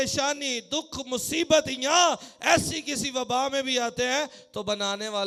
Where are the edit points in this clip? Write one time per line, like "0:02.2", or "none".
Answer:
none